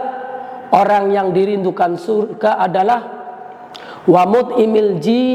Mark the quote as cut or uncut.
uncut